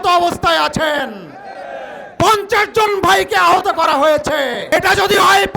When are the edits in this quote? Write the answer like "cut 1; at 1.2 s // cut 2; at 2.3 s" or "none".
cut 1; at 4.7 s